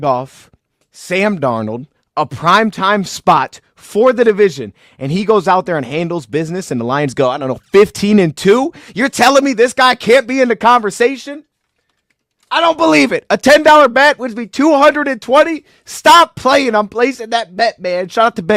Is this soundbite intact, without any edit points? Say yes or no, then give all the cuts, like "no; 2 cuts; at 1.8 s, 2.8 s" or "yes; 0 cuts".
yes; 0 cuts